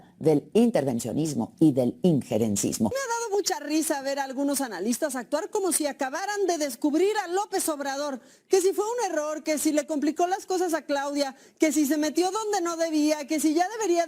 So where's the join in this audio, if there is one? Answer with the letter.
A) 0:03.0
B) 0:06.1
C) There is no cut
A